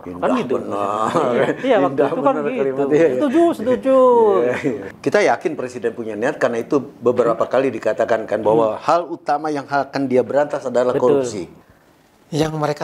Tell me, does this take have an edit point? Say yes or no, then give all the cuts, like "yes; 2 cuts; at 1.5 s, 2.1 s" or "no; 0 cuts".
yes; 2 cuts; at 4.9 s, 11.4 s